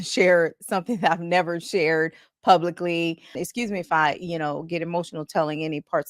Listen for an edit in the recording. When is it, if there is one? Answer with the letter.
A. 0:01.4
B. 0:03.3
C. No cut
B